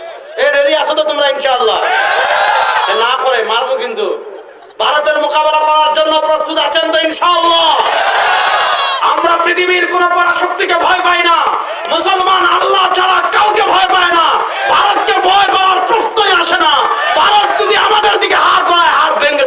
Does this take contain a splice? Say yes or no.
no